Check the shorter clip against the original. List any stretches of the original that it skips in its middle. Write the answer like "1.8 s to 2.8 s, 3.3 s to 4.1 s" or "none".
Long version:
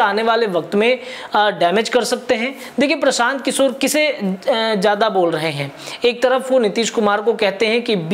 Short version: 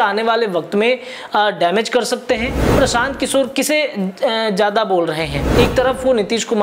2.7 s to 3.0 s, 5.6 s to 5.8 s